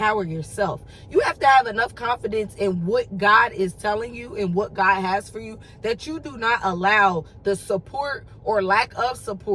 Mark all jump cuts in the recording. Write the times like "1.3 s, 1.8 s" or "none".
none